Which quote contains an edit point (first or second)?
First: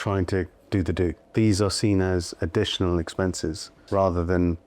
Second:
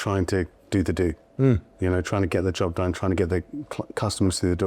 first